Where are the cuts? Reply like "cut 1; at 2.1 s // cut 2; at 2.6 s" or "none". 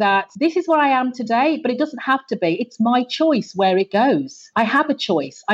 cut 1; at 4.4 s